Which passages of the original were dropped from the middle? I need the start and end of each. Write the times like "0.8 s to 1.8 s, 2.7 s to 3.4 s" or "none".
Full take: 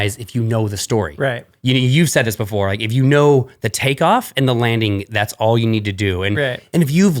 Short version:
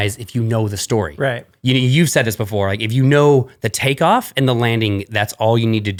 none